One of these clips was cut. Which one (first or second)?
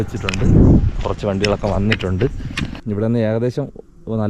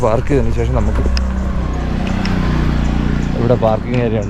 first